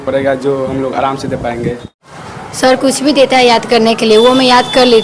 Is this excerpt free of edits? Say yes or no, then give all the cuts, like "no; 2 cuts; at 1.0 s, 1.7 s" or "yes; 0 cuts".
no; 1 cut; at 2.0 s